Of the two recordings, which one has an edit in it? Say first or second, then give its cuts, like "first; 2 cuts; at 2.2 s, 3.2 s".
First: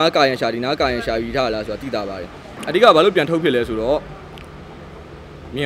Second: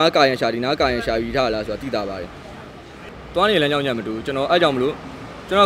first; 1 cut; at 2.6 s